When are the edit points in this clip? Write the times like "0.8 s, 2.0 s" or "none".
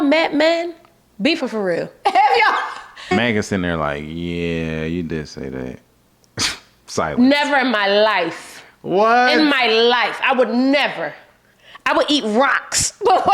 1.4 s, 3.1 s